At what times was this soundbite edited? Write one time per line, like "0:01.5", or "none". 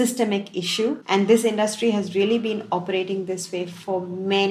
0:01.0